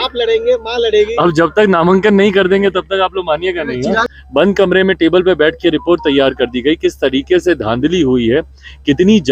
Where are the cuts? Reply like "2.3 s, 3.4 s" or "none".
4.1 s